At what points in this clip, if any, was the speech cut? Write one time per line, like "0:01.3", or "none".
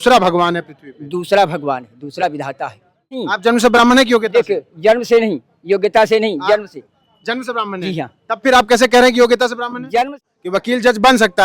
0:03.3
0:10.2